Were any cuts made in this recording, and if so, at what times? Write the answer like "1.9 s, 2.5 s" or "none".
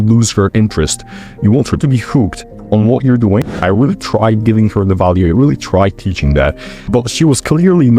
3.6 s